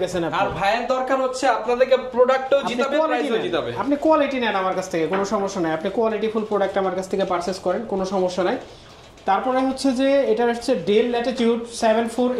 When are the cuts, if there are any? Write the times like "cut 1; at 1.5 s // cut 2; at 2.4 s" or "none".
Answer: none